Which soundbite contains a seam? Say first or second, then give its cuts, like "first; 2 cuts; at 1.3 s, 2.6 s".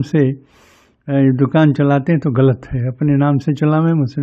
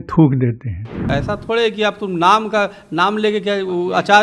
second; 1 cut; at 1.1 s